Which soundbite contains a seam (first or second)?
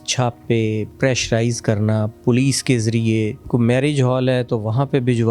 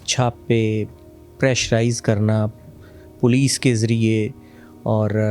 first